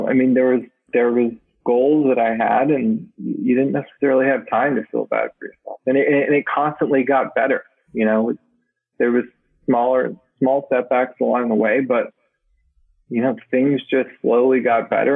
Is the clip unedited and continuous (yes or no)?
yes